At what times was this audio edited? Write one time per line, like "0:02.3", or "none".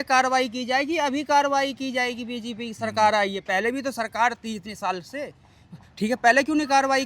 none